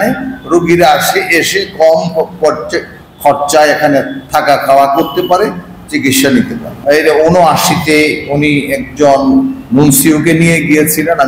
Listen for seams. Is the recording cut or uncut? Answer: cut